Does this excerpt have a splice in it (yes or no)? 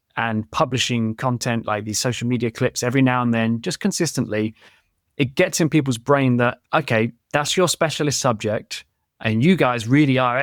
no